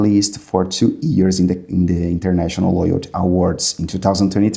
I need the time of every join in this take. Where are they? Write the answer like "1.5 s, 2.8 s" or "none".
none